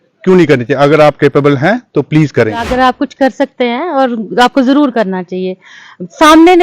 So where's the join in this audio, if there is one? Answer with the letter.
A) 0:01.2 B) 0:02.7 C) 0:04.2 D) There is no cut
B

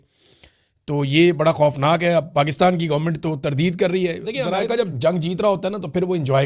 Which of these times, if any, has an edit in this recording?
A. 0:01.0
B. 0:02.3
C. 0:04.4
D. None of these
C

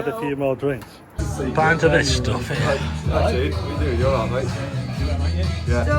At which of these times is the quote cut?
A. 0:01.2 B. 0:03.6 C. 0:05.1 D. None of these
A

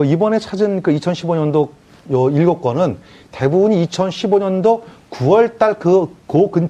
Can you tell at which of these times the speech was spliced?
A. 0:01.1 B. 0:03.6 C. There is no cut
B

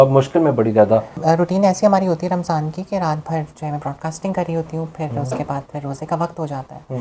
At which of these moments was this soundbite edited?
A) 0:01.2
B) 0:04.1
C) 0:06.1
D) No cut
A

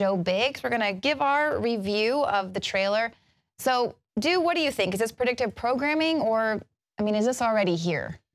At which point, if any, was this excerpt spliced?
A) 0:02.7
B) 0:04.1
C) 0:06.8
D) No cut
B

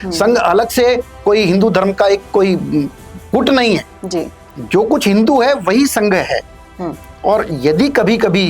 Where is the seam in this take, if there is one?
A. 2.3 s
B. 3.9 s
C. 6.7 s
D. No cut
D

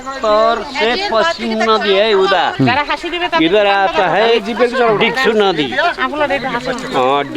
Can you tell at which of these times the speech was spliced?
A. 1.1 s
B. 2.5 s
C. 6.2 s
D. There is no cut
B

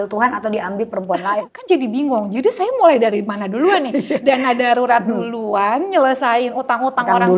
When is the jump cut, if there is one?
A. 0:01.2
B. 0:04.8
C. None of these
A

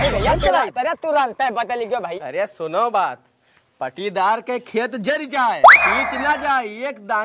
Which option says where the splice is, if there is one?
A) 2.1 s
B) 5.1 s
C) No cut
A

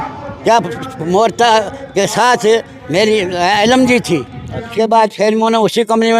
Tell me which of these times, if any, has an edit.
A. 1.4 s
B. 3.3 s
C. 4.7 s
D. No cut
C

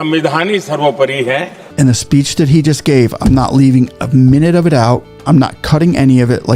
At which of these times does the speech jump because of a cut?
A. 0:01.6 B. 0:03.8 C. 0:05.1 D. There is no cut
A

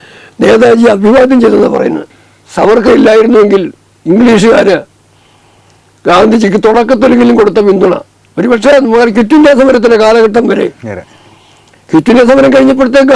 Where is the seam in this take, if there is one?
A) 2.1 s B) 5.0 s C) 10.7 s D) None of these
A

